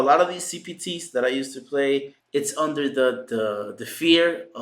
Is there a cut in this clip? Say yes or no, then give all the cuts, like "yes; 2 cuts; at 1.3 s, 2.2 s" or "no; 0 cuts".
yes; 1 cut; at 2.2 s